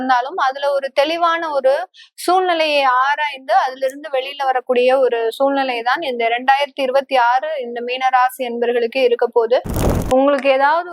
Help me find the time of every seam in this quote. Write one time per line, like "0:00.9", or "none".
0:09.9